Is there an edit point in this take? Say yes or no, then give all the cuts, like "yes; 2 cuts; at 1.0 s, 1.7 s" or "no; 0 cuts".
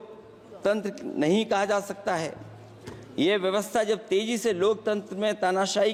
no; 0 cuts